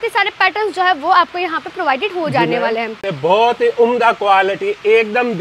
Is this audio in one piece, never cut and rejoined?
no; 1 cut; at 3.1 s

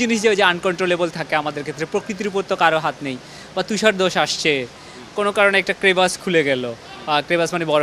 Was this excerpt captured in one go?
yes; 0 cuts

